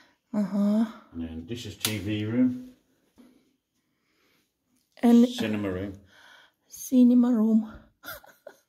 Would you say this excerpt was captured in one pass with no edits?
no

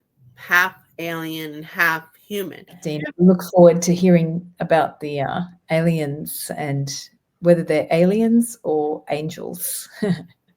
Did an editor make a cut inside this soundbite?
yes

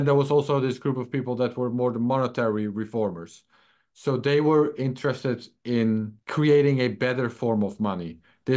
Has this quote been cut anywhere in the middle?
yes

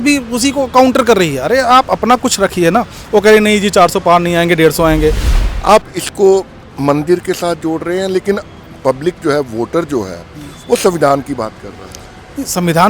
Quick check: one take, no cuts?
no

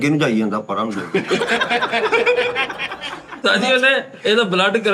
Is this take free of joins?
no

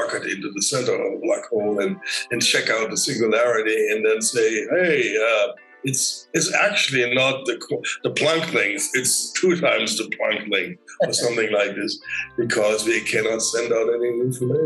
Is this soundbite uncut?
yes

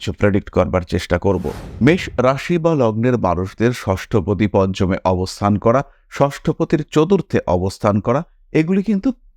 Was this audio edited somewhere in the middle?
yes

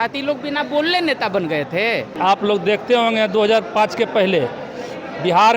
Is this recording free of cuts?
no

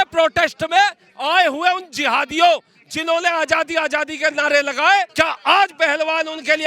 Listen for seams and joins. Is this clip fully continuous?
no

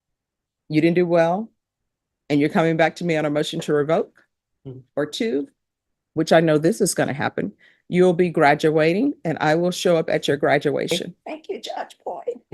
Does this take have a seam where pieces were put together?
yes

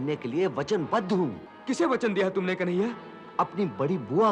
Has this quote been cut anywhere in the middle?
yes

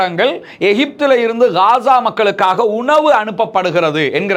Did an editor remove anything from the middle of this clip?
no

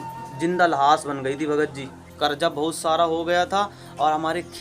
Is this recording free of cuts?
no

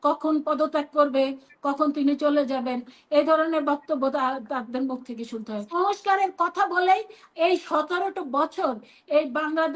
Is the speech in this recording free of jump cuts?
no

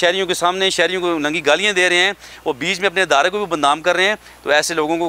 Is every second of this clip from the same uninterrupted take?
yes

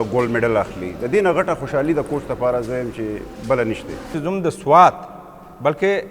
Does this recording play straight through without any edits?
no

